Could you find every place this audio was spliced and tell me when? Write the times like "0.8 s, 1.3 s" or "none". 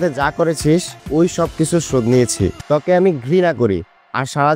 1.0 s, 2.6 s